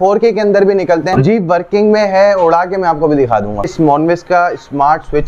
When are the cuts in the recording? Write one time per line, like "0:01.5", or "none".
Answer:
0:01.2
0:03.7